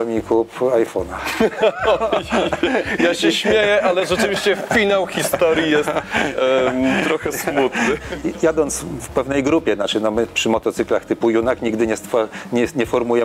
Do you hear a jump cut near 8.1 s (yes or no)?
yes